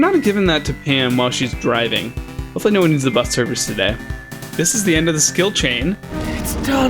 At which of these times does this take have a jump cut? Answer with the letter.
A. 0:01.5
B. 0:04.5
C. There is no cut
B